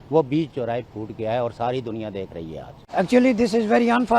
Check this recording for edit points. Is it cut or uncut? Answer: uncut